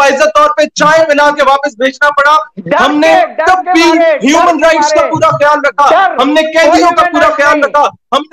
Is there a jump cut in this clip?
no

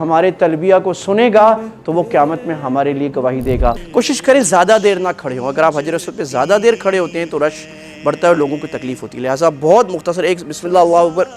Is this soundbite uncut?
no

